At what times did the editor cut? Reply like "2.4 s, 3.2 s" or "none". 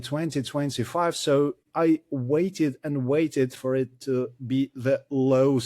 1.6 s